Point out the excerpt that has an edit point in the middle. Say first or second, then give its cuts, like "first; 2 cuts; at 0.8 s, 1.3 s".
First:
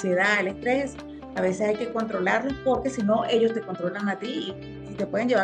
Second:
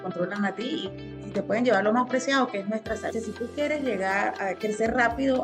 second; 1 cut; at 3.1 s